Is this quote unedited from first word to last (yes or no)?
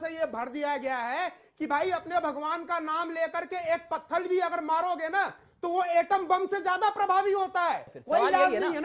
no